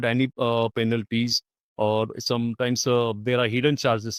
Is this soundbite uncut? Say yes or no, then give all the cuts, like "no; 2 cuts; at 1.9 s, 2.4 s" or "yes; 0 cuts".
yes; 0 cuts